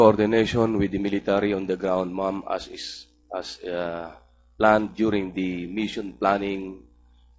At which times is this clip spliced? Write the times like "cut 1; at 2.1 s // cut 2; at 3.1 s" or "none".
cut 1; at 2.1 s